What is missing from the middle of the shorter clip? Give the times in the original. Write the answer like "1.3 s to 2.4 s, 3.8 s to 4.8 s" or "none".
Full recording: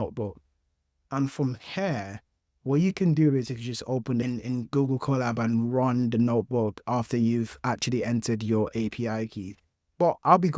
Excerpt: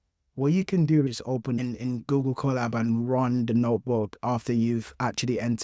3.8 s to 4.2 s